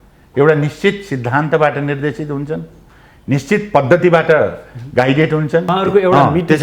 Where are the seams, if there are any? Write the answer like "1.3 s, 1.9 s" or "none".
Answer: 5.7 s